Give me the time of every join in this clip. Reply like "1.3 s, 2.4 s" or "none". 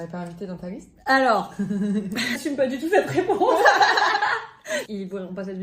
2.4 s, 4.9 s